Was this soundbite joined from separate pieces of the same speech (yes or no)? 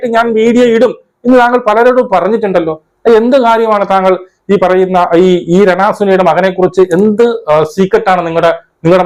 no